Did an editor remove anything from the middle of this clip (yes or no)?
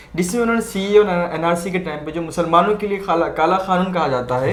no